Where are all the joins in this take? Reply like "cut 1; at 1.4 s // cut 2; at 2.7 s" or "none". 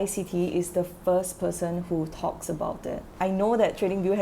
cut 1; at 3.1 s